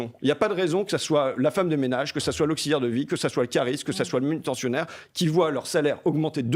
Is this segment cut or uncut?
uncut